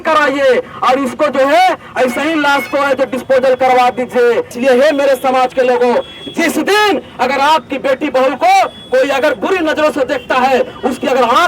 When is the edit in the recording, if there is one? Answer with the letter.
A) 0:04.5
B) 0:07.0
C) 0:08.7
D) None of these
A